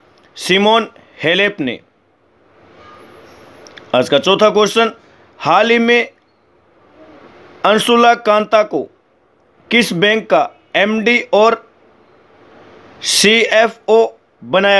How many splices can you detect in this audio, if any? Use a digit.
0